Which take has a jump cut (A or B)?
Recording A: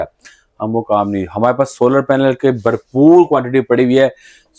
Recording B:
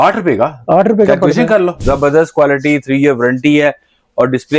B